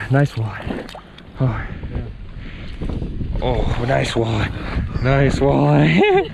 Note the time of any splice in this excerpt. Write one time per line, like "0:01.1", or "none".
0:01.8